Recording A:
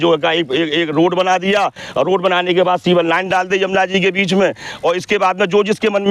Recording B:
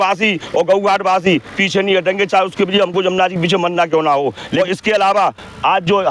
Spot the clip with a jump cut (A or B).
B